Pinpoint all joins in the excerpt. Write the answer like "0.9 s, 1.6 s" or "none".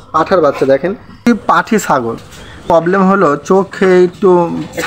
1.3 s, 2.6 s